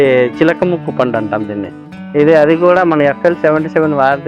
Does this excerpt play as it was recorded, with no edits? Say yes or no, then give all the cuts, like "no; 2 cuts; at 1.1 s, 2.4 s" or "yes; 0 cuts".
no; 1 cut; at 2.0 s